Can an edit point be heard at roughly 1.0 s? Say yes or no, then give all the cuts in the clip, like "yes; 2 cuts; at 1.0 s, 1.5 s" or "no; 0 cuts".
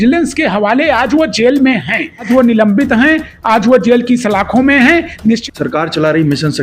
no; 2 cuts; at 2.3 s, 5.4 s